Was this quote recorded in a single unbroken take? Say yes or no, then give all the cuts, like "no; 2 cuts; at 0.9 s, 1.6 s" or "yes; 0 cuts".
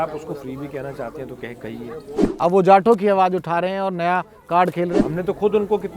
no; 2 cuts; at 2.2 s, 5.0 s